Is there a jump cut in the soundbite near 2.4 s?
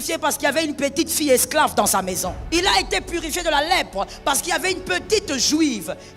yes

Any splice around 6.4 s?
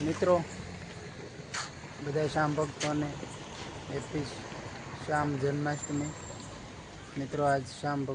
no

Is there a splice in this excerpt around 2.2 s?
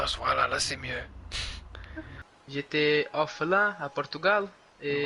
yes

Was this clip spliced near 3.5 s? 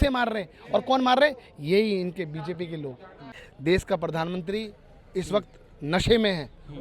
yes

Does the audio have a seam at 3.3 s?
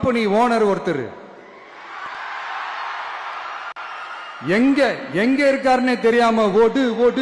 no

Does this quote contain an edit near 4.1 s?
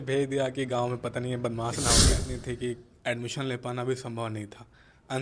no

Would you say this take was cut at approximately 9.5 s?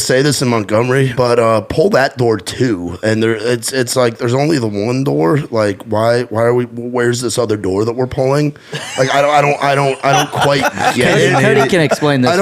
no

